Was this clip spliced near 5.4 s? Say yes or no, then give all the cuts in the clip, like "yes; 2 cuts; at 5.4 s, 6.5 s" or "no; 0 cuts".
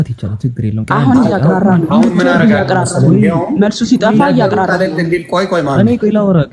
no; 0 cuts